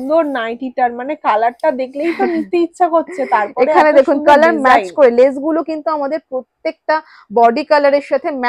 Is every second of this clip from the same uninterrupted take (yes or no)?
yes